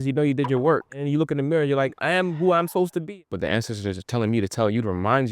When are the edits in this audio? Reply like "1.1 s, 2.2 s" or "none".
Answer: 1.0 s, 2.0 s, 3.0 s

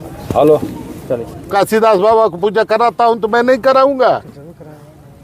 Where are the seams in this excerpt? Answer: 1.5 s

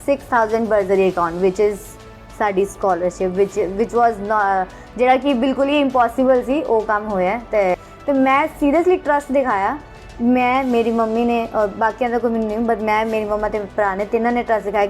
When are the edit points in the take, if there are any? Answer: 7.9 s

